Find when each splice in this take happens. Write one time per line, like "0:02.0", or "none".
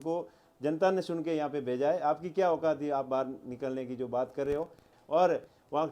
0:04.9